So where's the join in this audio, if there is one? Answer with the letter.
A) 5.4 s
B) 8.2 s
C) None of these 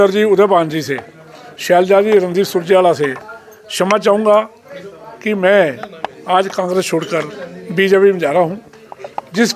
C